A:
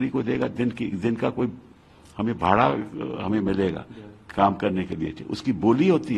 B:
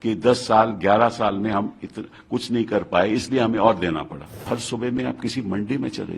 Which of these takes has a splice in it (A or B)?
B